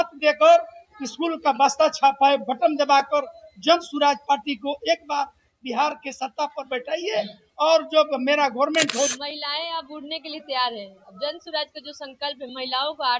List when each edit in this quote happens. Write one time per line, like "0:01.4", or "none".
0:09.1